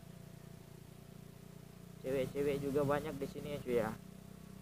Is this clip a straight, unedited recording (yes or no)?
yes